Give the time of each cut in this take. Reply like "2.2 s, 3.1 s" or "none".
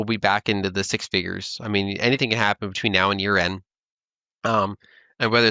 none